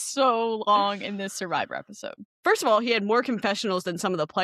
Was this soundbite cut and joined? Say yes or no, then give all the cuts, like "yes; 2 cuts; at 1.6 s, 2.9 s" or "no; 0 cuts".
yes; 1 cut; at 2.2 s